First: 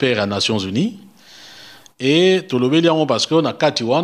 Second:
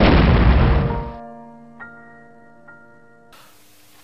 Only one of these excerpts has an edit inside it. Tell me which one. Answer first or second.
second